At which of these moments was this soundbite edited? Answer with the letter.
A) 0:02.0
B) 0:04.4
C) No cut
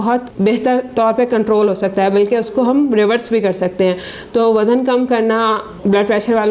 C